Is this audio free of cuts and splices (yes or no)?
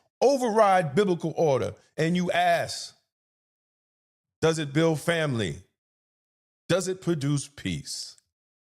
yes